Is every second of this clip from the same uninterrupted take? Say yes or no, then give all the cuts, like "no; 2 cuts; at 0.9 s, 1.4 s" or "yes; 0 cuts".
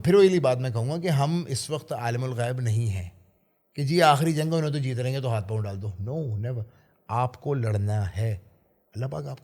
yes; 0 cuts